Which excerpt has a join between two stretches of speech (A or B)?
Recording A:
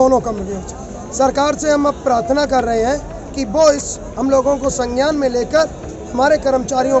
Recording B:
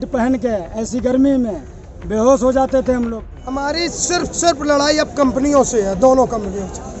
B